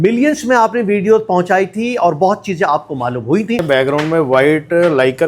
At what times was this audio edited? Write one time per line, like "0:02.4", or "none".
0:03.6